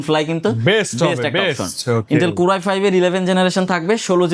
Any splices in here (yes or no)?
no